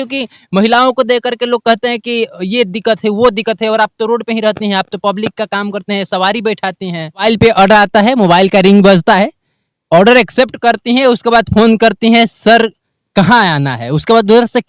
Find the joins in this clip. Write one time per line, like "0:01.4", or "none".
0:07.2